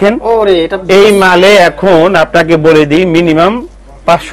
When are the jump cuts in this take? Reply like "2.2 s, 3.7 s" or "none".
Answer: none